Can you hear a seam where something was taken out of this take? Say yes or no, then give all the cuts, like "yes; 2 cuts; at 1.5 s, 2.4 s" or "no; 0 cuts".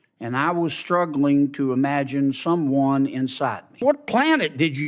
yes; 1 cut; at 3.8 s